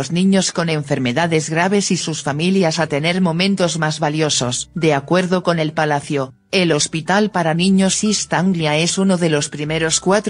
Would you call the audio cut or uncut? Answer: cut